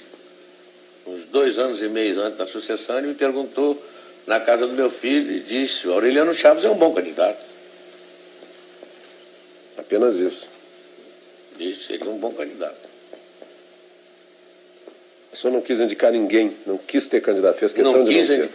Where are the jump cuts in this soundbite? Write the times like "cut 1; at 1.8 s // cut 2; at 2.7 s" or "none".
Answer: none